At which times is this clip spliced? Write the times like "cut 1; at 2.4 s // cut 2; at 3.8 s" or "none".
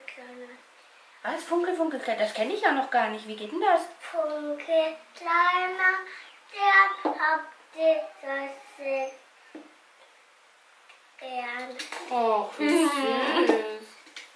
none